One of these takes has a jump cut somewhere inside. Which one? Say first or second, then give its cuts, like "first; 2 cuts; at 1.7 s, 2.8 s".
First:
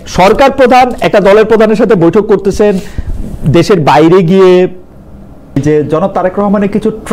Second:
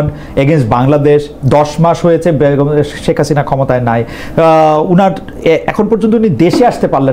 first; 1 cut; at 5.6 s